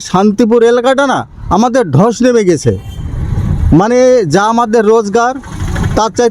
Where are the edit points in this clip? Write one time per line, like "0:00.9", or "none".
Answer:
none

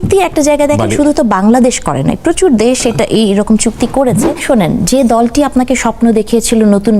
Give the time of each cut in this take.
0:04.4

